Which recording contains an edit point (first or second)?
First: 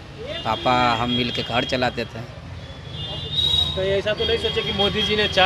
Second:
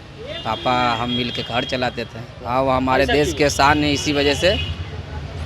second